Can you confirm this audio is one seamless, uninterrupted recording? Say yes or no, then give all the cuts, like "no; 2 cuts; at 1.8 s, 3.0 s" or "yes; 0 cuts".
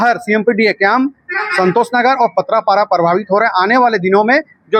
yes; 0 cuts